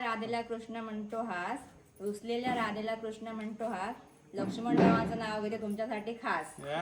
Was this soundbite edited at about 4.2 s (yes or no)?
no